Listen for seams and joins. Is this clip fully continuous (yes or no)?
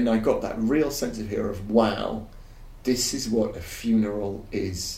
yes